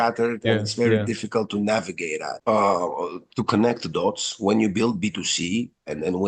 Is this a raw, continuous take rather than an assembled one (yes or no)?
no